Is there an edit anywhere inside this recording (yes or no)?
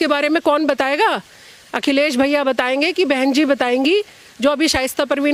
no